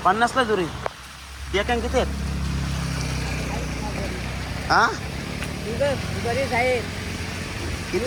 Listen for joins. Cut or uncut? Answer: uncut